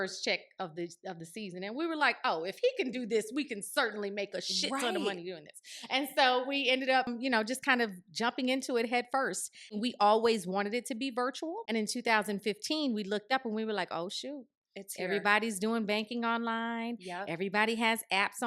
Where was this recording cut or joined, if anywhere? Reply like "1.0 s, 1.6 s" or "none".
7.1 s, 9.8 s, 11.6 s